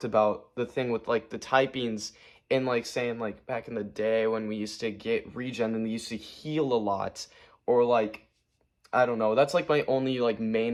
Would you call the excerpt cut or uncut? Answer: uncut